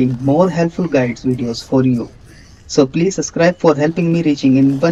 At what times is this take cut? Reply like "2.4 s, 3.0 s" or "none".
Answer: 2.2 s